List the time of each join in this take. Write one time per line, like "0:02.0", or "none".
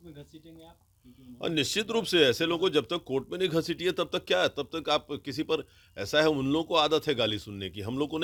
none